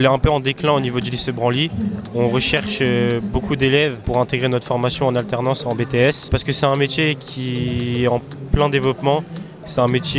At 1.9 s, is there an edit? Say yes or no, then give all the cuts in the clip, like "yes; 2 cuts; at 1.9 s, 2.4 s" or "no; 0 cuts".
no; 2 cuts; at 4.0 s, 6.3 s